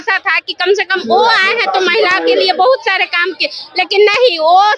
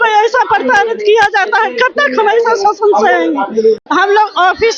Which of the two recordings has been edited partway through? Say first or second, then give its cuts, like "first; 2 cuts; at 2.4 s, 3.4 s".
second; 1 cut; at 3.8 s